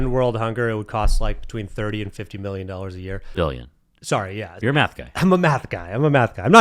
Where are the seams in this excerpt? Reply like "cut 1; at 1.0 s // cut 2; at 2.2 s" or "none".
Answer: cut 1; at 3.2 s // cut 2; at 4.6 s